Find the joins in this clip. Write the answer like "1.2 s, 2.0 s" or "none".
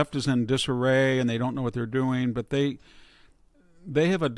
none